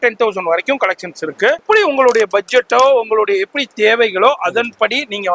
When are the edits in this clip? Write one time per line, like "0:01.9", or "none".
0:01.6